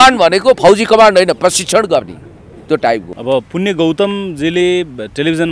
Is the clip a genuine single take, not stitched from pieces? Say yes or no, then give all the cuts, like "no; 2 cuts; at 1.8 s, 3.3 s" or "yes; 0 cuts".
no; 1 cut; at 3.1 s